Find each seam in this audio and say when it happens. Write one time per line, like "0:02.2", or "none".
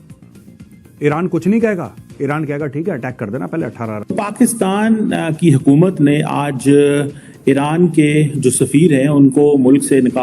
0:04.3